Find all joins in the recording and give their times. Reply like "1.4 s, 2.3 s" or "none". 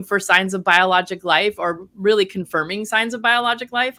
none